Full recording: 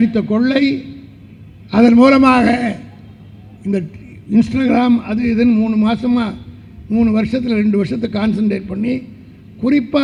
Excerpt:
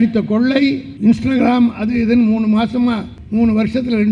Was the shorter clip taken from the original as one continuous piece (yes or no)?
no